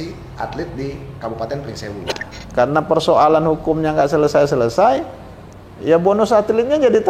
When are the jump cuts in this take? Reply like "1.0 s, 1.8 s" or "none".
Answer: 2.1 s